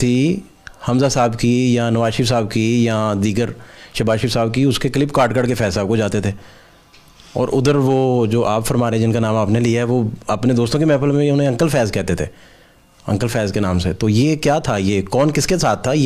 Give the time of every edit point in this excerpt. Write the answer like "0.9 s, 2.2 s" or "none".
none